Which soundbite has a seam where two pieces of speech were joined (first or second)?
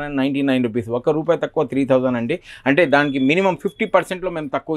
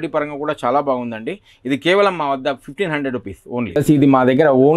second